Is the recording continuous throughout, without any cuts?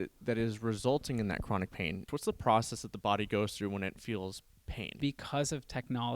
no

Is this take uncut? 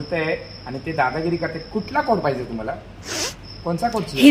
yes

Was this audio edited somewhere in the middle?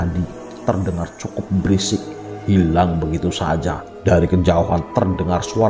yes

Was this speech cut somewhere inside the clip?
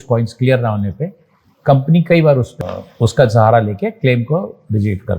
yes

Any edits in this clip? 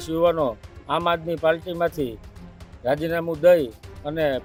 no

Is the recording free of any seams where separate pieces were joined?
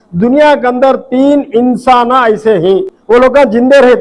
no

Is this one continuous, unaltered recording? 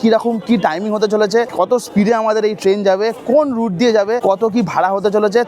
no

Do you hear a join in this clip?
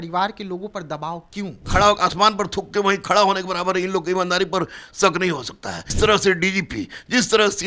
yes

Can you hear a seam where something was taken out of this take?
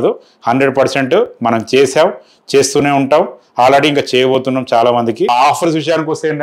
yes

